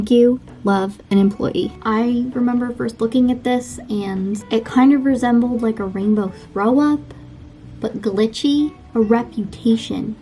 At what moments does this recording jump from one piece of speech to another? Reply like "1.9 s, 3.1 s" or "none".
1.8 s, 4.4 s, 8.9 s